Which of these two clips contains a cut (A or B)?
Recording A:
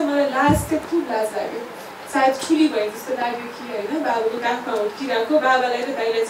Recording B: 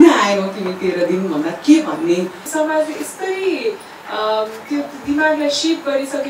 B